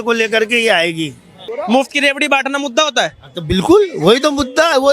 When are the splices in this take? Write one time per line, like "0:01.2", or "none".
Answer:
0:01.5

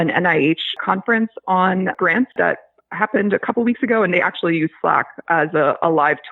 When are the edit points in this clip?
0:00.8
0:02.3

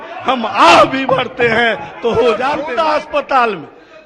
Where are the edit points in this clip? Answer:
0:02.6

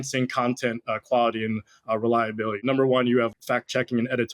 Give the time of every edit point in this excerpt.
0:02.6
0:03.3

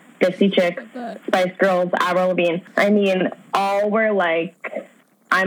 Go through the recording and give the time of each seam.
0:02.7

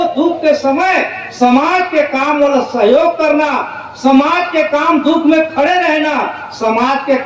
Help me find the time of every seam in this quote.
none

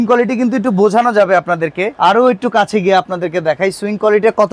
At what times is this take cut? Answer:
0:01.9

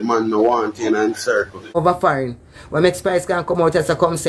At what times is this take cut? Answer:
0:01.8

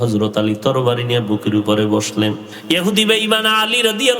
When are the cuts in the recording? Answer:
0:02.5

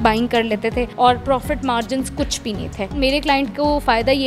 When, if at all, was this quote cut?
0:00.9
0:03.0

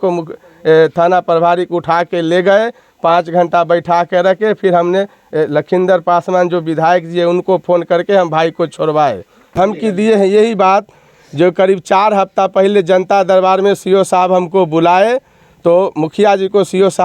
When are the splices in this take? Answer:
0:09.5

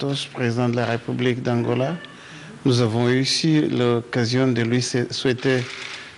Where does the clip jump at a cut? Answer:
0:00.9

